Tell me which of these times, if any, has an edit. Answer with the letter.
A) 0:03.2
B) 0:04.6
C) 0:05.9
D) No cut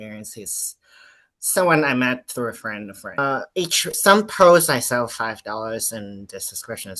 A